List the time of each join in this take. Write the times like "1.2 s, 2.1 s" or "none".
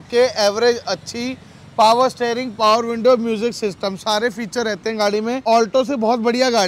5.4 s